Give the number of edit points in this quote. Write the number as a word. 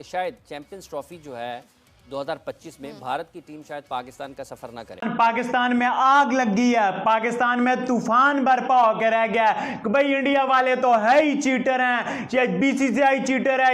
one